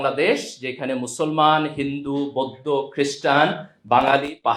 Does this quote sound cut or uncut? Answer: uncut